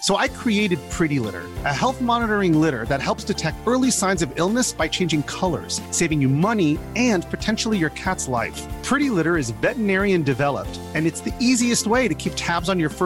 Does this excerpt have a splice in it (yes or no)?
no